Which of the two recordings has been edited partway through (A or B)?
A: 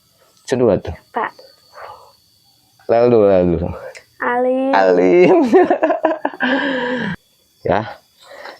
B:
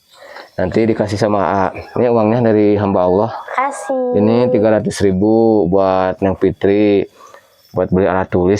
A